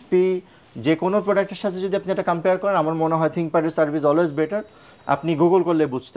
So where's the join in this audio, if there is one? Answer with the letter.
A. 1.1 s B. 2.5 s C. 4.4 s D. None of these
D